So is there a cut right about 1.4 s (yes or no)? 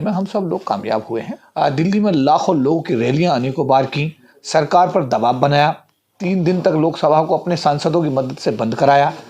yes